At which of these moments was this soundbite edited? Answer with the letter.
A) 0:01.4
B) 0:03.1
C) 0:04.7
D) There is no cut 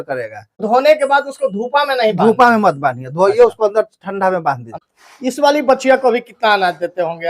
C